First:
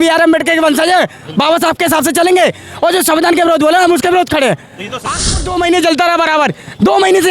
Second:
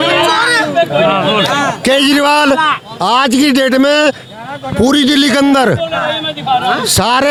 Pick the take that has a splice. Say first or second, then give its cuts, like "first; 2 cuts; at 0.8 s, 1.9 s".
first; 1 cut; at 5.4 s